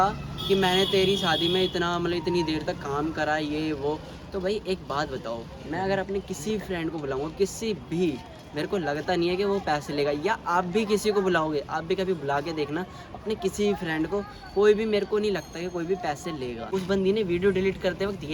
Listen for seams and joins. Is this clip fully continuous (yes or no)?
no